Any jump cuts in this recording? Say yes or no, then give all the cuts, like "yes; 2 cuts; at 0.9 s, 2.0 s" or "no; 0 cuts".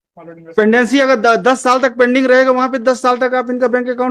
no; 0 cuts